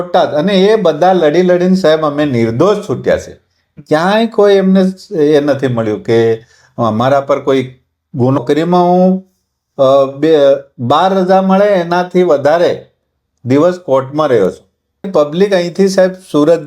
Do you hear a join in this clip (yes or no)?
yes